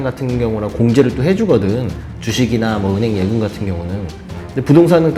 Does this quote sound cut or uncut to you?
uncut